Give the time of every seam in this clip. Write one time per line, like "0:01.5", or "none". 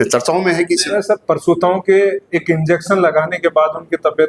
0:00.9